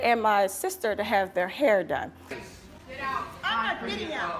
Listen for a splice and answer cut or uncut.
cut